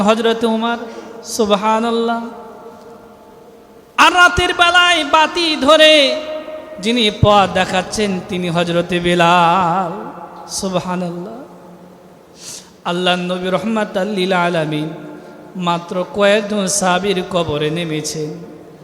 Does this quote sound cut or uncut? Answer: uncut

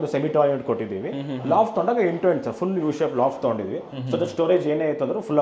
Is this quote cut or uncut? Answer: uncut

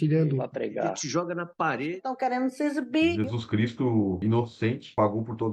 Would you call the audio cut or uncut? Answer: uncut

